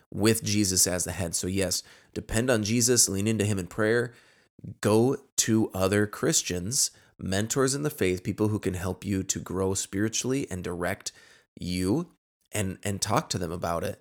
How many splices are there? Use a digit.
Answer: 0